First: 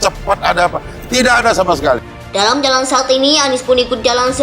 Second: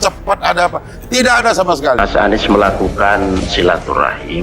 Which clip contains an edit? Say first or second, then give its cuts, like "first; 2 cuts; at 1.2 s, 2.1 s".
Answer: second; 1 cut; at 2.0 s